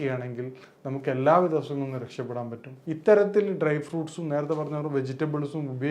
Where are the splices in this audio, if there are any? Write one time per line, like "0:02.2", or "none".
0:02.7